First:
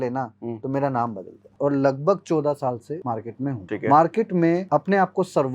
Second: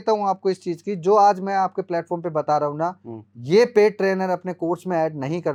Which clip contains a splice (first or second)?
first